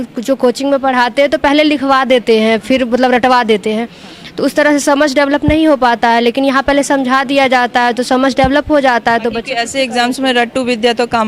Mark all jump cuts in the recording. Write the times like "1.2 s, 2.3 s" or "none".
none